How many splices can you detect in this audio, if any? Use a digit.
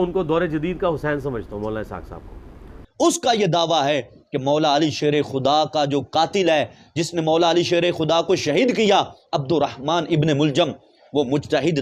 1